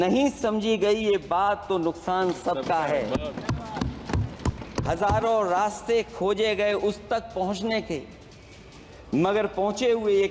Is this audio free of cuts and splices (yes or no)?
yes